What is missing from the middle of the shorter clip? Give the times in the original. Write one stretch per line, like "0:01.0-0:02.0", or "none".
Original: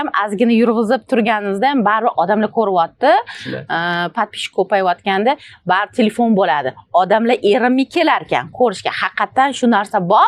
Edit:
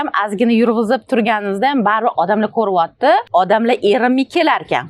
0:03.3-0:06.9